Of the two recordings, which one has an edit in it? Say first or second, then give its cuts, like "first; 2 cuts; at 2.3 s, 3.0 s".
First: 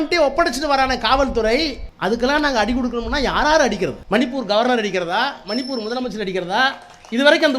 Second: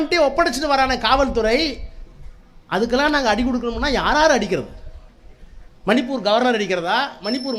first; 2 cuts; at 1.8 s, 4.0 s